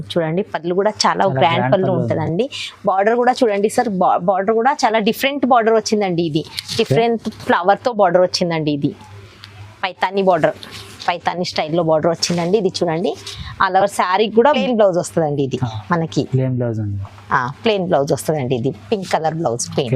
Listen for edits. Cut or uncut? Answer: cut